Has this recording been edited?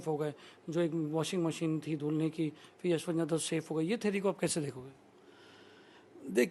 no; 0 cuts

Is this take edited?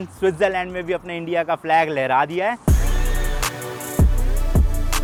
no; 0 cuts

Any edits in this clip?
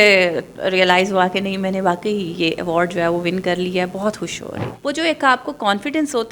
yes; 1 cut; at 4.7 s

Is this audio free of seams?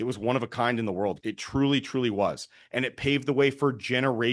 no; 1 cut; at 1.2 s

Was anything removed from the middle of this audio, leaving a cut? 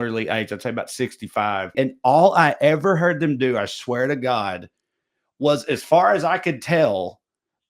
yes; 1 cut; at 1.7 s

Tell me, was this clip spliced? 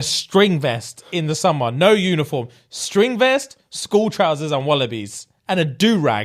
yes; 1 cut; at 5.3 s

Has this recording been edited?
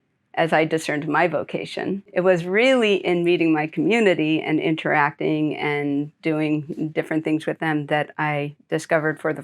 yes; 1 cut; at 2.1 s

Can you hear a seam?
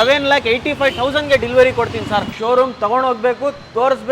yes; 1 cut; at 2.3 s

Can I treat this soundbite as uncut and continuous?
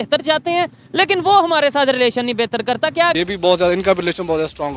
no; 1 cut; at 3.2 s

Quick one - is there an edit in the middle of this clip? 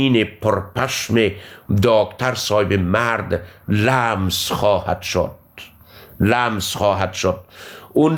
no; 0 cuts

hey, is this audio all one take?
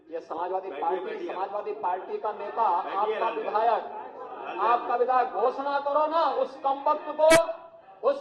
yes; 0 cuts

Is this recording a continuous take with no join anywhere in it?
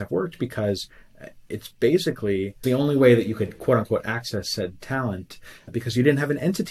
no; 2 cuts; at 2.6 s, 5.7 s

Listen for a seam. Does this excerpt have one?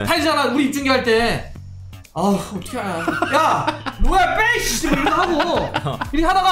no; 0 cuts

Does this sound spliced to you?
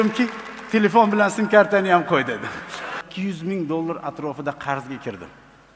yes; 1 cut; at 3.0 s

